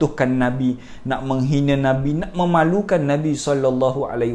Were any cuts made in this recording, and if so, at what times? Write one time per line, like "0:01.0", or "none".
none